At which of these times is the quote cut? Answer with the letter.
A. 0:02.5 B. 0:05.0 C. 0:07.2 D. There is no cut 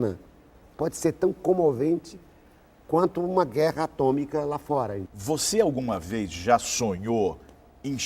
B